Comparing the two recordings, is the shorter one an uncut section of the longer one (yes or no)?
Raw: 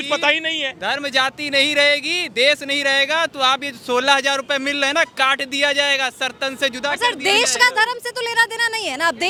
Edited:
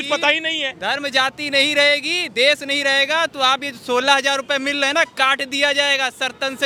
yes